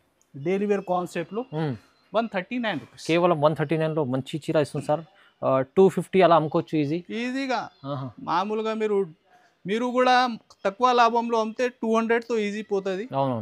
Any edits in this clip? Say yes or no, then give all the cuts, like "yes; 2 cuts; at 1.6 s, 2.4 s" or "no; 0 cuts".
no; 0 cuts